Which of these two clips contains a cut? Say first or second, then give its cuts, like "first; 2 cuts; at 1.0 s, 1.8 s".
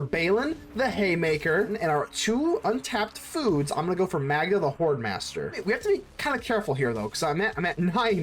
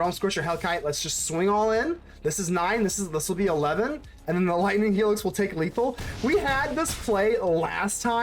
first; 2 cuts; at 1.7 s, 5.6 s